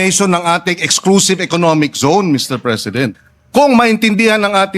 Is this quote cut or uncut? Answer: cut